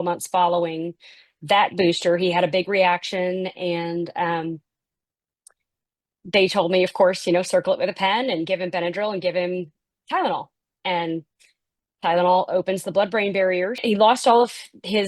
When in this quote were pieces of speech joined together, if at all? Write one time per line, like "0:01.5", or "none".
0:13.8